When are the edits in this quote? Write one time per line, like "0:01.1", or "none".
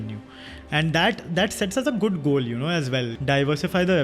0:03.1